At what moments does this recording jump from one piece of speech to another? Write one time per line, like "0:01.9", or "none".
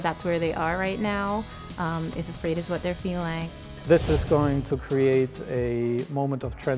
0:03.5